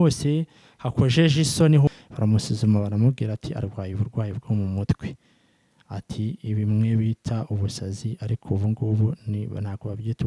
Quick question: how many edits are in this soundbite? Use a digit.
1